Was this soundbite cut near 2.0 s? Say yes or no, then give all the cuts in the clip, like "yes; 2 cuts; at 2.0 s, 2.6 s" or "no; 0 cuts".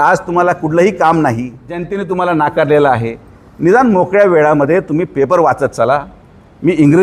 yes; 1 cut; at 2.0 s